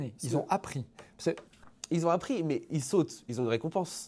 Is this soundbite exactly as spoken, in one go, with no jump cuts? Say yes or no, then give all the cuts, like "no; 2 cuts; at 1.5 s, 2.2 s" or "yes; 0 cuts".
yes; 0 cuts